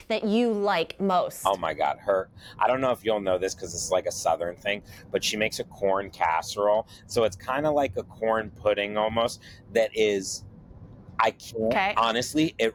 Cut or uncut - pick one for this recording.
uncut